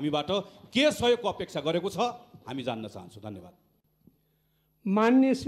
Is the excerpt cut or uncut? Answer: uncut